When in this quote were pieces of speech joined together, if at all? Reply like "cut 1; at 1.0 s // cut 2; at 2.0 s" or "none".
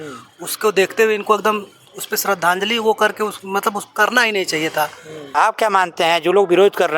cut 1; at 5.3 s

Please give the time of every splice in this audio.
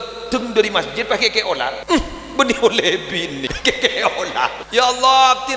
cut 1; at 1.8 s // cut 2; at 3.5 s // cut 3; at 4.6 s

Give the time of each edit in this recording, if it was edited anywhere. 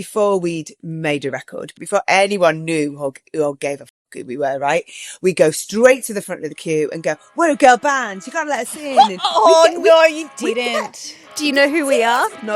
cut 1; at 1.8 s

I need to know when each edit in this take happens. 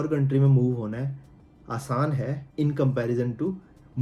none

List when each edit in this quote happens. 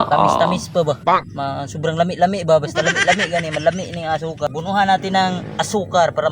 cut 1; at 4.5 s

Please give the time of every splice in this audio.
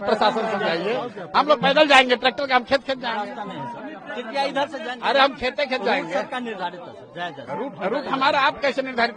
none

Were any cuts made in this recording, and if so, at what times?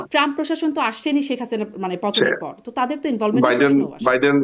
none

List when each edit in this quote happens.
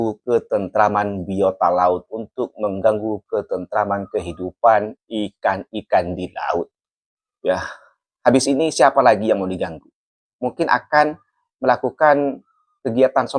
none

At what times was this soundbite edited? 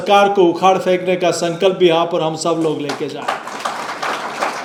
none

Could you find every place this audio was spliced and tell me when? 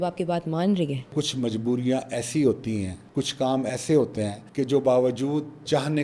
cut 1; at 1.1 s

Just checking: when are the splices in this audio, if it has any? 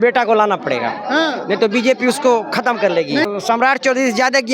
cut 1; at 3.2 s

